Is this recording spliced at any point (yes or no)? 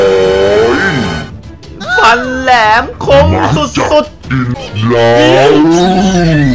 yes